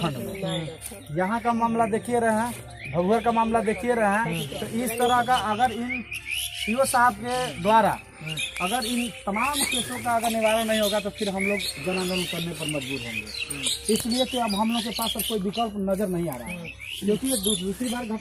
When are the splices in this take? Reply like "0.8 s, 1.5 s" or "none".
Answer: none